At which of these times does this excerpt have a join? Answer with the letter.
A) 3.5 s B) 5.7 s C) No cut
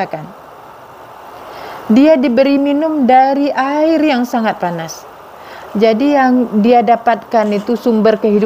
C